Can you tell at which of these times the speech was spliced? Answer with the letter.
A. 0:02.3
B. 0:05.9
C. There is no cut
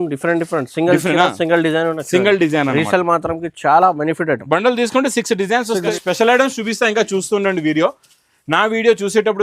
B